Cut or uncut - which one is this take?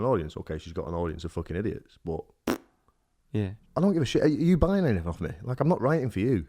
cut